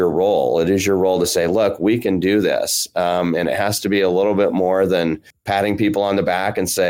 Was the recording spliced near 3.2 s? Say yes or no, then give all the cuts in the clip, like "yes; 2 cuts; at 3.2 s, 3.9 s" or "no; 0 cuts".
no; 1 cut; at 5.3 s